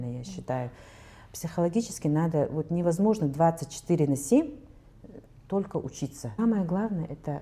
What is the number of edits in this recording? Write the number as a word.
one